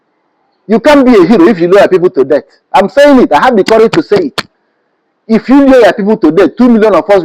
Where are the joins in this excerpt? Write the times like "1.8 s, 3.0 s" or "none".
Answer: none